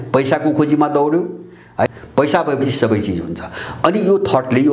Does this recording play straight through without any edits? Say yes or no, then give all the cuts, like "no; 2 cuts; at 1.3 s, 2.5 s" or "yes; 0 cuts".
no; 1 cut; at 1.9 s